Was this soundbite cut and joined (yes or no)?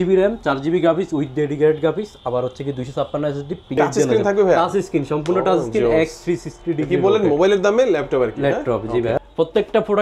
yes